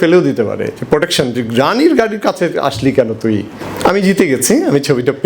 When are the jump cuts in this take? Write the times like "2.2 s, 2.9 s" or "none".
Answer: 3.6 s